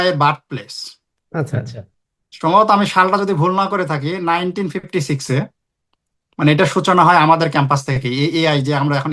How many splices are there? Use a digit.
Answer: 0